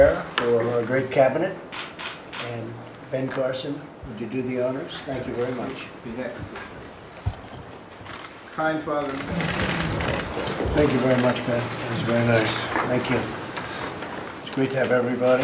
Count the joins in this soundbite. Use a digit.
1